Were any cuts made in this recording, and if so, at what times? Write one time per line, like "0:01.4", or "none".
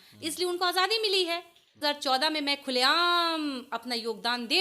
0:01.8

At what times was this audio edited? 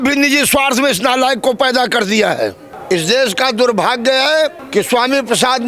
0:02.7
0:04.6

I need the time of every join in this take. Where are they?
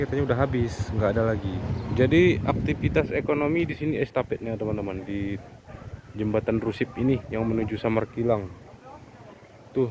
0:01.7

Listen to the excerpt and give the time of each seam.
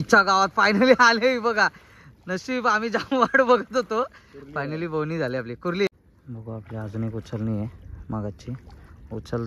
0:05.9

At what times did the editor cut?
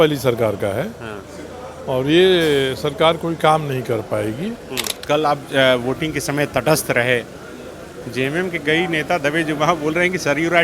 0:04.9

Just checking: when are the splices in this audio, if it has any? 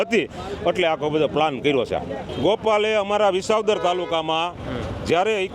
0:02.2

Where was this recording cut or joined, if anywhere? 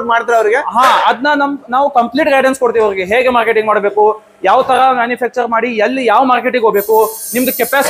none

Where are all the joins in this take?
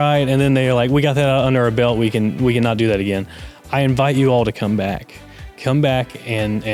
none

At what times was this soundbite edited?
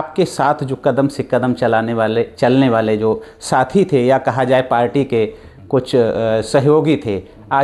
none

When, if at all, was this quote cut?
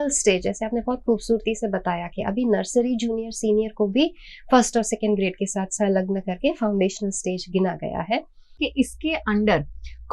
0:08.6

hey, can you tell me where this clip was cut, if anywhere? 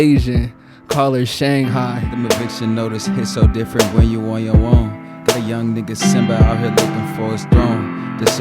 0:02.0

